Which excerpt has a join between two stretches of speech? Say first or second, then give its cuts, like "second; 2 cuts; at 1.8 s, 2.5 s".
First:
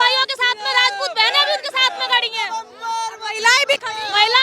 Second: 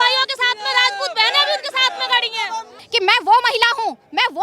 second; 1 cut; at 2.8 s